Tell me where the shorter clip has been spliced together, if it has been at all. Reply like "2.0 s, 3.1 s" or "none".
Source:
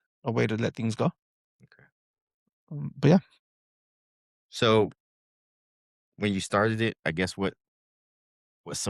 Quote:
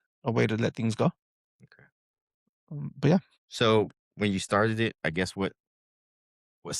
3.4 s, 4.0 s